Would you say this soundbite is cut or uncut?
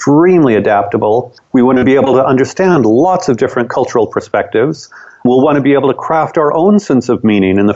cut